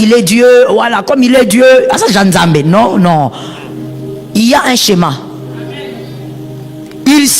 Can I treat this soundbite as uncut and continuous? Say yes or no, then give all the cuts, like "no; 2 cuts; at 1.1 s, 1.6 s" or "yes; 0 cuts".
yes; 0 cuts